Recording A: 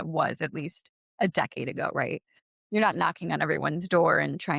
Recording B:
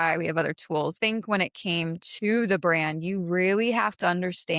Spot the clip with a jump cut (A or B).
B